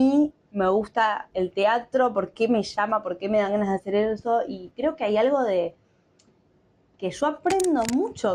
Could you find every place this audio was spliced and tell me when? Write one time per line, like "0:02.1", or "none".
none